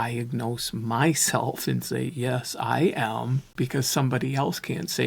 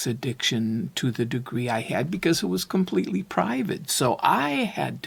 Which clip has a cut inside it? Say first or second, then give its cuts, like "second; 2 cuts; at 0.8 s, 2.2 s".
first; 1 cut; at 3.4 s